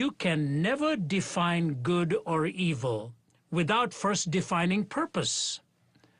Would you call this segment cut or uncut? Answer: cut